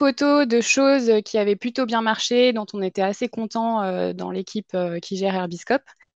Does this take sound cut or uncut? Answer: uncut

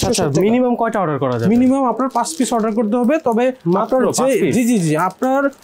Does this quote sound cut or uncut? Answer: uncut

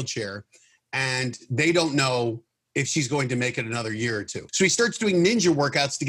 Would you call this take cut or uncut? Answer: cut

